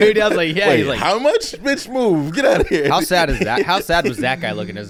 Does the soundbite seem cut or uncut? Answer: uncut